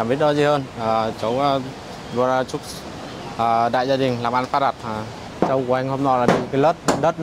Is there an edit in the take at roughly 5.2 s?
yes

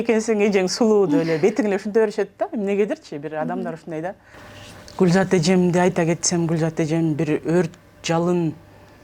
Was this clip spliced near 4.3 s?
yes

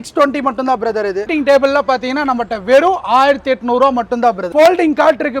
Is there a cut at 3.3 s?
no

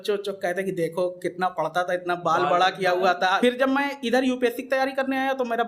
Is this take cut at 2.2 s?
no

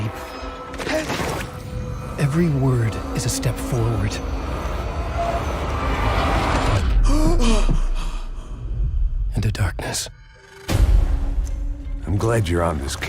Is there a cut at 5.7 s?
yes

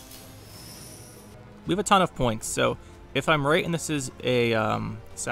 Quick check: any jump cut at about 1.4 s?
yes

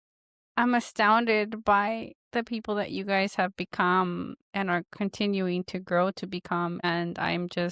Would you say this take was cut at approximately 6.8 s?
yes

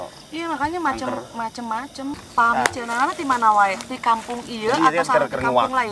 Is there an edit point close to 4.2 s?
no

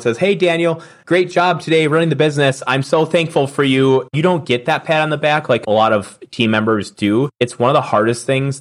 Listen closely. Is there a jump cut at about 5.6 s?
yes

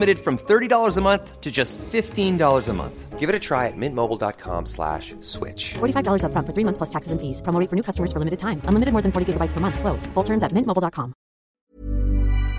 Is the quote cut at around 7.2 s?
no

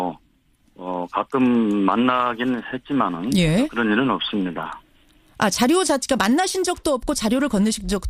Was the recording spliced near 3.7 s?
yes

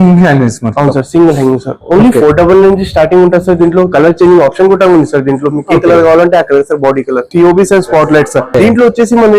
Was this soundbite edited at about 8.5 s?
yes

